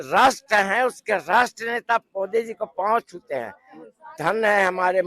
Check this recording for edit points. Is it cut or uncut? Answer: uncut